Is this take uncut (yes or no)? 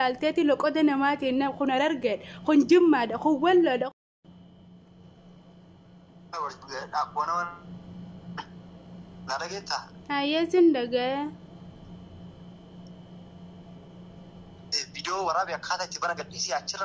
yes